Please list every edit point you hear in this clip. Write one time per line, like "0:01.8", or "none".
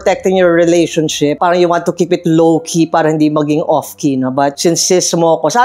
none